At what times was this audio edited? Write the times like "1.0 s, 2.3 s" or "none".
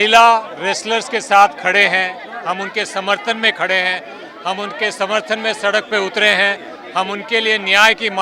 none

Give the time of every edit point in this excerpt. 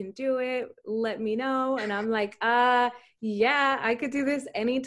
none

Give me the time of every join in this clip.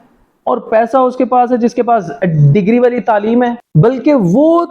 3.6 s

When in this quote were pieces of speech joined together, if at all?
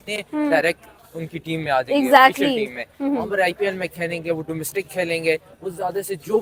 none

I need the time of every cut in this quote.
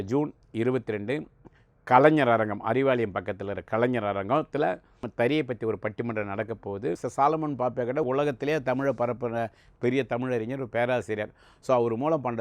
5.1 s, 7.0 s, 8.0 s

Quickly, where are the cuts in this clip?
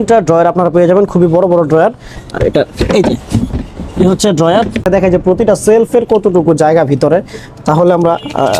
4.9 s

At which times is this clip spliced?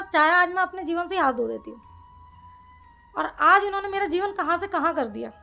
none

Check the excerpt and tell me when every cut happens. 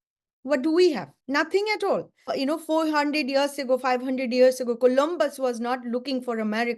1.1 s, 2.3 s

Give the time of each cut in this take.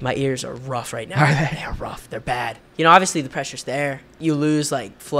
2.6 s, 4.1 s

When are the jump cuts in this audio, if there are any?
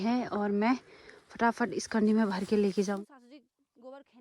3.0 s

